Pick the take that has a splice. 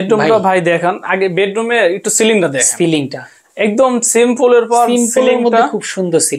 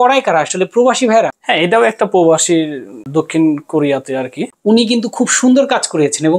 second; 3 cuts; at 1.4 s, 3.0 s, 4.4 s

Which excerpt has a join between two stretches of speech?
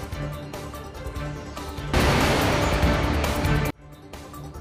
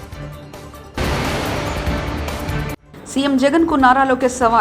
second; 2 cuts; at 0.9 s, 2.8 s

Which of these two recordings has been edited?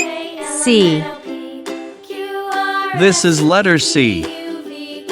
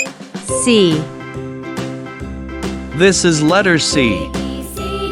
first; 3 cuts; at 1.0 s, 3.0 s, 4.2 s

